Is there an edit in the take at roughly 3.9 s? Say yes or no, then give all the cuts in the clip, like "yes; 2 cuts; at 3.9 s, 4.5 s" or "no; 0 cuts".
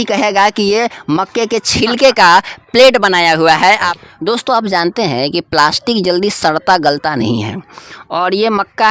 yes; 1 cut; at 3.9 s